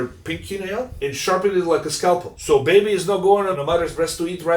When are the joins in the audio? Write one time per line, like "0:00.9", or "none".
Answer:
0:00.9
0:02.3
0:03.5